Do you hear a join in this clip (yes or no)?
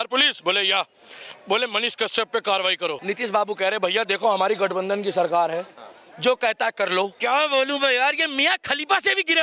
yes